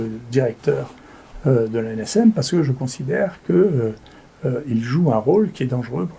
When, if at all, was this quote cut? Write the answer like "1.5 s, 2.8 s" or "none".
none